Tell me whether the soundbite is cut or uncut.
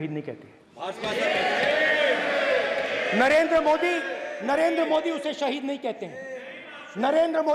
uncut